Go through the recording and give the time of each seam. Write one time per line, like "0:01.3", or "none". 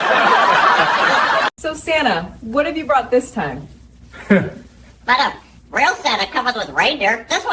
0:01.6